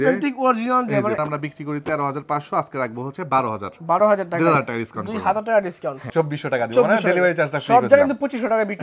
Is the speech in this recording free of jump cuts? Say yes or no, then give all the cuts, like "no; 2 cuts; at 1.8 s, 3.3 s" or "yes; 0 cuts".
no; 2 cuts; at 1.2 s, 6.1 s